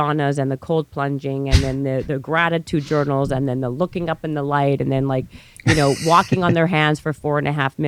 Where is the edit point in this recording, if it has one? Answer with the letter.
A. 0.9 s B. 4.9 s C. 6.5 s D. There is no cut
D